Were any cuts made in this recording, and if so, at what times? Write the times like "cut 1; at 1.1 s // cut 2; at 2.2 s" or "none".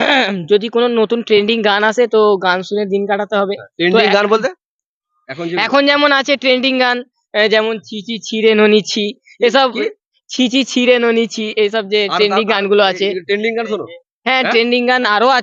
none